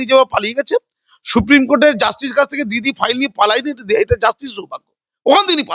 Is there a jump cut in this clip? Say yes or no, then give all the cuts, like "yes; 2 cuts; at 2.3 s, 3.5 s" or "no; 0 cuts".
no; 0 cuts